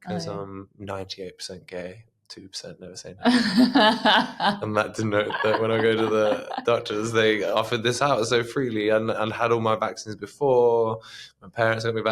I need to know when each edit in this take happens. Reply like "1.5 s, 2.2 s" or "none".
none